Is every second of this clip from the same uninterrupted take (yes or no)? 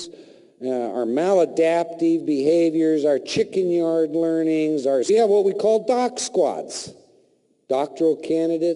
yes